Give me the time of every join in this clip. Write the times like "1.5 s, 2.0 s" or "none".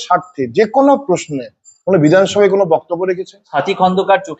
3.4 s